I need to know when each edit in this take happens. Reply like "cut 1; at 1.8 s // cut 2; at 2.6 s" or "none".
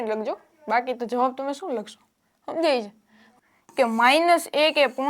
cut 1; at 3.2 s